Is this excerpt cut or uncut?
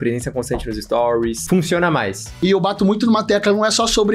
cut